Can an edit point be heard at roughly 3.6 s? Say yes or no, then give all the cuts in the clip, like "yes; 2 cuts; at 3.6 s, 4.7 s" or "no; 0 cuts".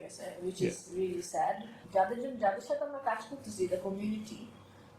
no; 1 cut; at 1.7 s